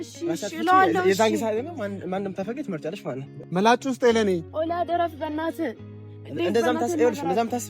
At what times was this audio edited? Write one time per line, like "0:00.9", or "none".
0:03.3